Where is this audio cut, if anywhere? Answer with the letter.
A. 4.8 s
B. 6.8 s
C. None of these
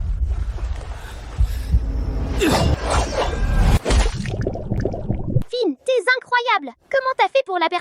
A